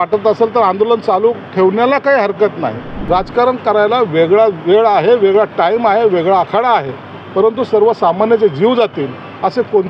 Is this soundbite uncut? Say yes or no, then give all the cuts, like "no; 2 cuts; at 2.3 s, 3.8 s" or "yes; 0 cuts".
no; 1 cut; at 2.9 s